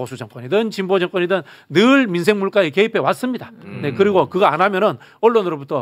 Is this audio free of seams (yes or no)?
yes